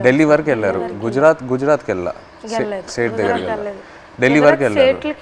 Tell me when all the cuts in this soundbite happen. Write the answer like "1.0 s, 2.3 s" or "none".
none